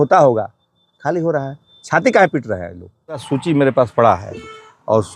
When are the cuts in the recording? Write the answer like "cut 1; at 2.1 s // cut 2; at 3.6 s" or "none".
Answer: cut 1; at 3.2 s